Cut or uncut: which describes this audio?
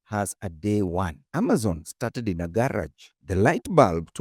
uncut